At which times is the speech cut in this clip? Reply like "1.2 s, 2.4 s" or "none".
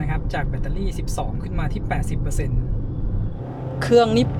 3.3 s